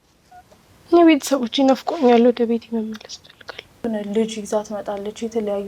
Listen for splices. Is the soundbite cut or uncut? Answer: cut